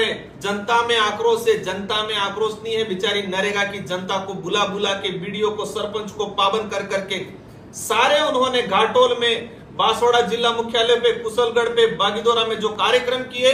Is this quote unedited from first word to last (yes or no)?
yes